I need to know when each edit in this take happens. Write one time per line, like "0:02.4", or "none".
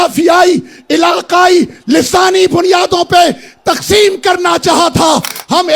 none

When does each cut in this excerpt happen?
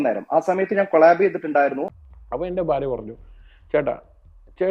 0:01.8

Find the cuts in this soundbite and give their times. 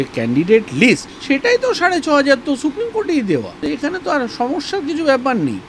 0:01.1
0:03.7

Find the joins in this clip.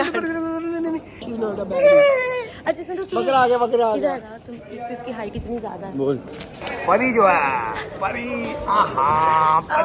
0:01.3
0:02.5
0:04.3
0:06.6

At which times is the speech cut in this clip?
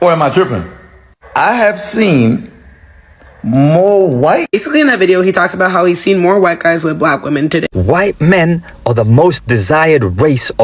0:07.7

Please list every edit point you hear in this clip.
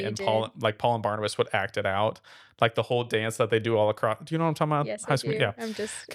none

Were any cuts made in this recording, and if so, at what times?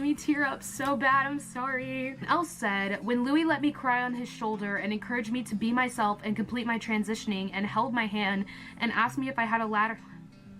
0:02.3

